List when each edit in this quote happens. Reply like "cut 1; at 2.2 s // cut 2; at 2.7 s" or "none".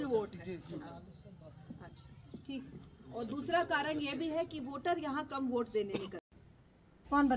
none